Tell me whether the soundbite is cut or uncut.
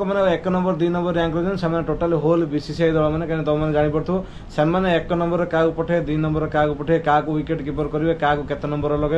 uncut